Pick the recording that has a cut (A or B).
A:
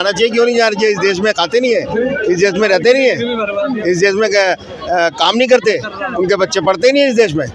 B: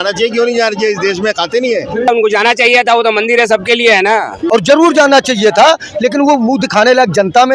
B